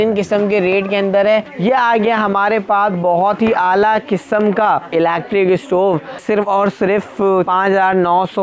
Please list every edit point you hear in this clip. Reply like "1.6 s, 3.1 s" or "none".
1.5 s, 4.9 s, 6.2 s, 7.5 s

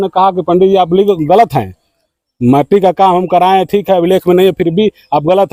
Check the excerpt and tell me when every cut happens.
none

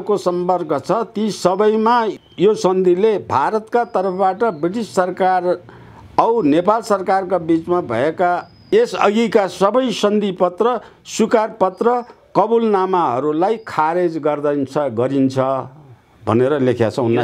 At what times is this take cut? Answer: 2.1 s, 8.7 s

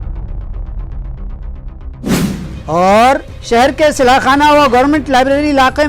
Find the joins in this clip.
none

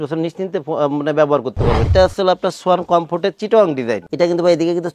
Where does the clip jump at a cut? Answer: 1.8 s

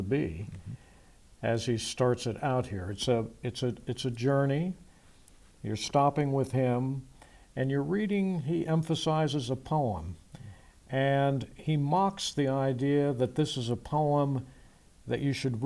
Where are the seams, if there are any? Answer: 13.2 s

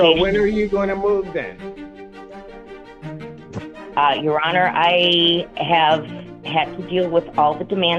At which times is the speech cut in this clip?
none

